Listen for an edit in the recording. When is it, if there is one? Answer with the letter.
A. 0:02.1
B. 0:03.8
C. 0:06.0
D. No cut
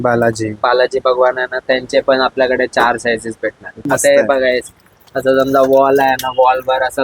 B